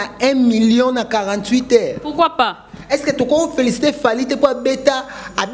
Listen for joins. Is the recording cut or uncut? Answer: uncut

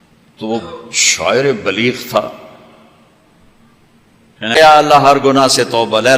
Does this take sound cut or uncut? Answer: cut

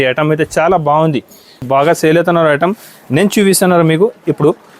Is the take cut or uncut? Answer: cut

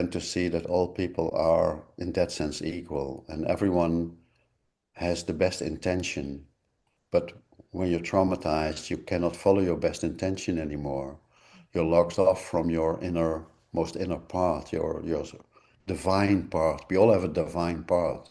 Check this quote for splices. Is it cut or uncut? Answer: uncut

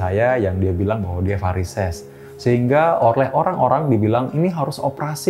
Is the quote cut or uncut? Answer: uncut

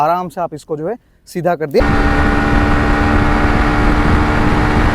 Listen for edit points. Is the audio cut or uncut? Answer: cut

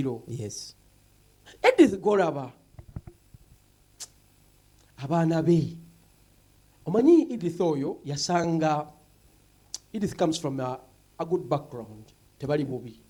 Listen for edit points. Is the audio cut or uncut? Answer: uncut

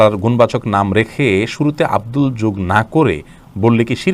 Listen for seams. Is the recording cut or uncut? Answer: uncut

